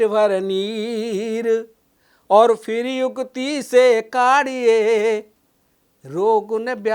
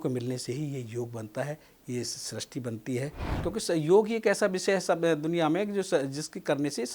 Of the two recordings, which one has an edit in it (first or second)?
second